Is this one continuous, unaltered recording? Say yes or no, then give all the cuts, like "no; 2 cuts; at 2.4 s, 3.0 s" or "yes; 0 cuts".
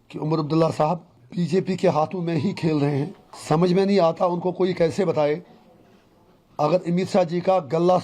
no; 2 cuts; at 1.2 s, 3.3 s